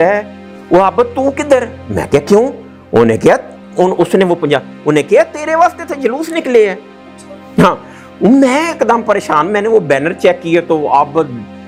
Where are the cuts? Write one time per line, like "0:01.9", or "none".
none